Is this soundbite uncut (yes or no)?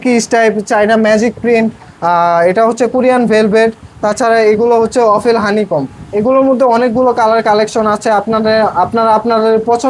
yes